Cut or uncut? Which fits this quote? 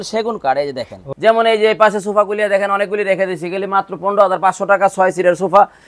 cut